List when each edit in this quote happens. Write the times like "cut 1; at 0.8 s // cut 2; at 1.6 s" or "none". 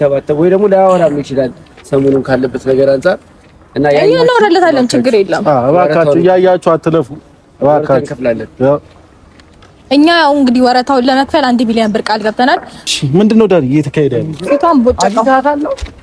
cut 1; at 12.9 s